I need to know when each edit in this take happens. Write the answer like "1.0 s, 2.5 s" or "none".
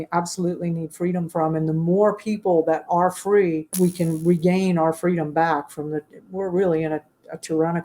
3.7 s